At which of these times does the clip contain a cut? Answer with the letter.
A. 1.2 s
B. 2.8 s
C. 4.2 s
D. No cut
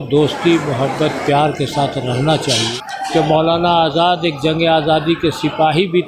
B